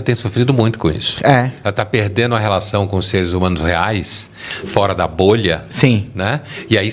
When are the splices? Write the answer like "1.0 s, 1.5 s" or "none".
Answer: none